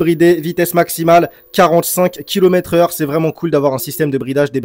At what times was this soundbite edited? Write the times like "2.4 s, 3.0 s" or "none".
none